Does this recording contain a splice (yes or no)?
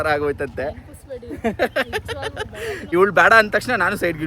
yes